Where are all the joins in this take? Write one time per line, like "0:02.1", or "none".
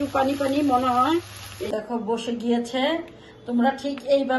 0:01.7